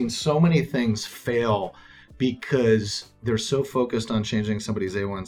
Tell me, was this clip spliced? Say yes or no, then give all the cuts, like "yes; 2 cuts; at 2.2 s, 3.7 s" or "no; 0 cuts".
no; 0 cuts